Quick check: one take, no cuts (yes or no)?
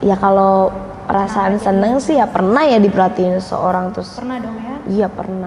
yes